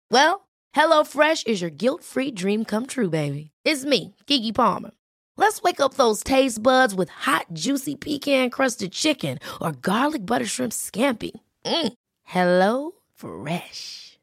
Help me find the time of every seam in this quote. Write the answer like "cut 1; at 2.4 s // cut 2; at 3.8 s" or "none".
none